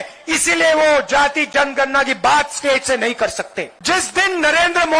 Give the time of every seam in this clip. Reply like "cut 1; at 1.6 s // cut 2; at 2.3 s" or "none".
cut 1; at 3.7 s